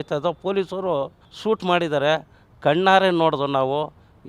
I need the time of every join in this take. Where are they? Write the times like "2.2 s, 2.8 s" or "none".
1.2 s